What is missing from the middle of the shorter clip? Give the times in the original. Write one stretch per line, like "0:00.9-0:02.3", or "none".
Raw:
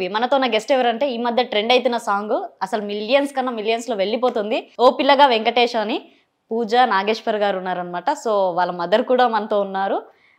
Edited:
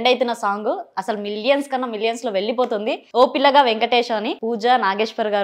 0:06.0-0:06.4